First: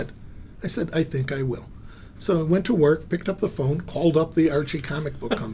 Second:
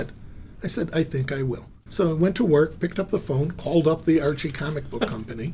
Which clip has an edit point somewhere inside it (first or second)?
second